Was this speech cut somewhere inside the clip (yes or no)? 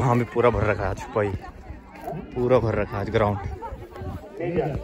no